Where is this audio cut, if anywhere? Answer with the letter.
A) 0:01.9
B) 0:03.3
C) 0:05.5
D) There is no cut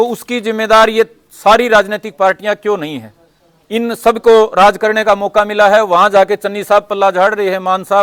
D